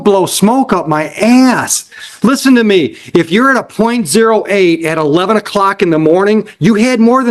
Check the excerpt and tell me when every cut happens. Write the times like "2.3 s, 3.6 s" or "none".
none

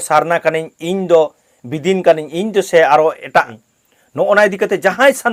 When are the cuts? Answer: none

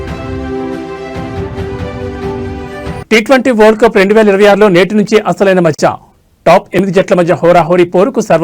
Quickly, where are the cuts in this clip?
none

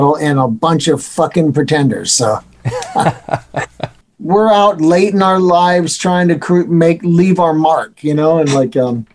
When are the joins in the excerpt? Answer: 4.0 s

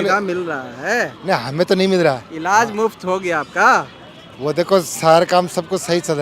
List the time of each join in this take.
none

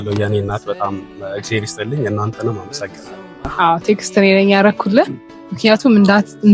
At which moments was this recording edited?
3.5 s

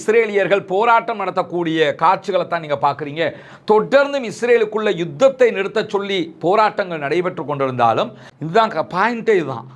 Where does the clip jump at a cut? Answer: 8.3 s

